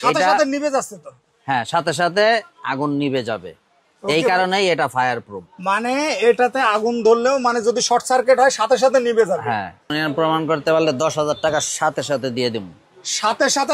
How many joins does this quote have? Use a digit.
1